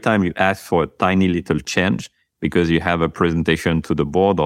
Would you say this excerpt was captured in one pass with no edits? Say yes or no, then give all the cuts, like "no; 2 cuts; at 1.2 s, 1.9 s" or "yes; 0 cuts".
yes; 0 cuts